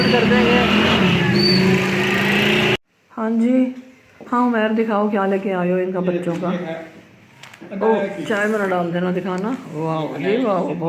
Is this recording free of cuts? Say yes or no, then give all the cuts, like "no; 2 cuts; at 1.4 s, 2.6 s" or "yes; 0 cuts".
no; 1 cut; at 2.8 s